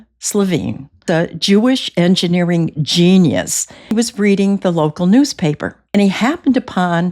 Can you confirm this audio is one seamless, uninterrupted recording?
no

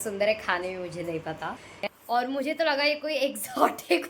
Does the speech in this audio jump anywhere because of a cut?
yes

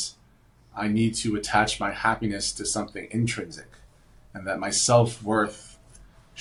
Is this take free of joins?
yes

